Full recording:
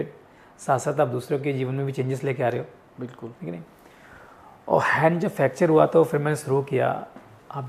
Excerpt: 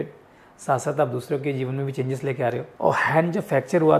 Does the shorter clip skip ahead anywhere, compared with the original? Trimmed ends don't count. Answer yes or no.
yes